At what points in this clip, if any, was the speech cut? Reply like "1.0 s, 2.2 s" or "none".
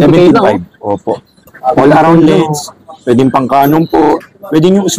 1.4 s